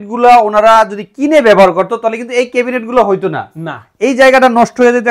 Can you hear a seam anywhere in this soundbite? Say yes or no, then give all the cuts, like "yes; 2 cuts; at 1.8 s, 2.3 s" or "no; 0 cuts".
no; 0 cuts